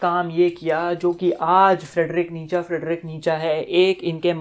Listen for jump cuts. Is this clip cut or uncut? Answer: uncut